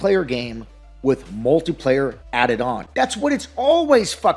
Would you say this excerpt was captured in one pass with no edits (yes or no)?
no